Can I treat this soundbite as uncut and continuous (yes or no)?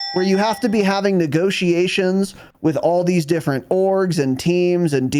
yes